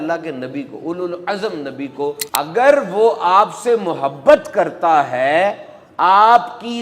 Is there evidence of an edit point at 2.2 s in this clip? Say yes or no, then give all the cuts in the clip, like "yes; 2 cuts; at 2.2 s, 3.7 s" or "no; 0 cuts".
yes; 1 cut; at 2.2 s